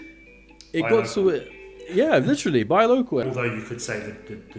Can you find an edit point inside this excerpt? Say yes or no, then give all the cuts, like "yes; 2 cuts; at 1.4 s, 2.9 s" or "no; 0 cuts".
yes; 1 cut; at 3.2 s